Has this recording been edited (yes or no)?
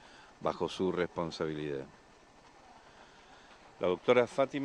no